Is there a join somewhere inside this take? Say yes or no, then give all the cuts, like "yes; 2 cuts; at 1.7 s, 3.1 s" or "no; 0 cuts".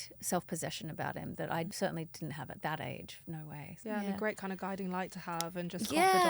no; 0 cuts